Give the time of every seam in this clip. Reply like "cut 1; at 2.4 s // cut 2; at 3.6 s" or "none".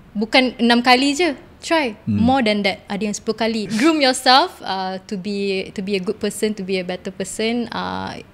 cut 1; at 3.7 s

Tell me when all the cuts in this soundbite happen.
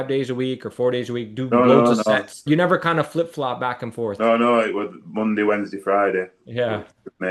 cut 1; at 2.4 s // cut 2; at 5.0 s

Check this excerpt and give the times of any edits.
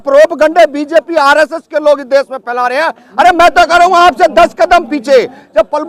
none

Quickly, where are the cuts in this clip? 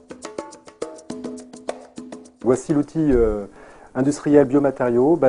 cut 1; at 1.9 s

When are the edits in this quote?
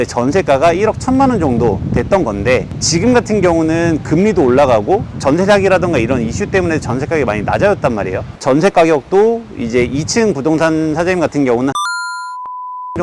cut 1; at 8.3 s

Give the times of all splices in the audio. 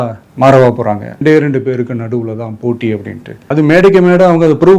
cut 1; at 1.1 s

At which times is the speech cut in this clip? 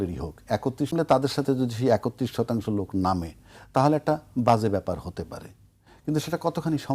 cut 1; at 0.9 s

